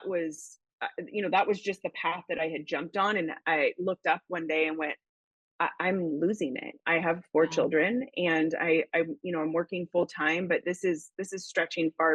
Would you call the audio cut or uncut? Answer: uncut